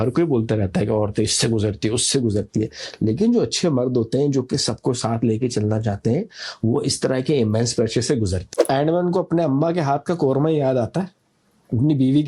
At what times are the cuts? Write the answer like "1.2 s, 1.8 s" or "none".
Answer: 8.5 s